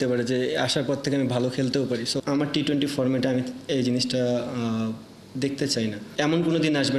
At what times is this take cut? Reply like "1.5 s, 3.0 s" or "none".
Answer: 2.2 s, 6.0 s